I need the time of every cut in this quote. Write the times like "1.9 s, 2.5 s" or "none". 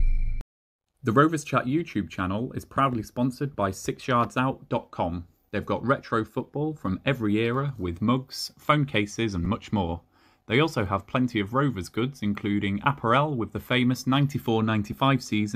1.0 s